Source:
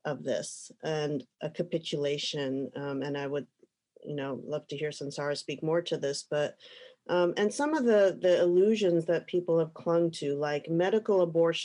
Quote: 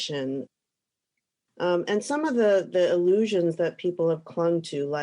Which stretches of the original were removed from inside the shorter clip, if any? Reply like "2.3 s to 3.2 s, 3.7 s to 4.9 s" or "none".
3.2 s to 6.5 s